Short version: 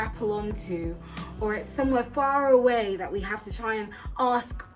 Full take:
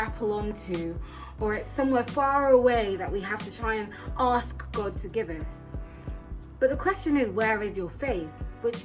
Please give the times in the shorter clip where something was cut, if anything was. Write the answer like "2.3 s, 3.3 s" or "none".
none